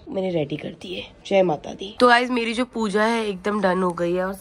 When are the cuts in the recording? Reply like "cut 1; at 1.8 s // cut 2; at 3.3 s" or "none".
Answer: none